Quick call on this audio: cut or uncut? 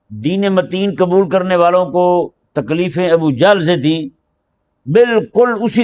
uncut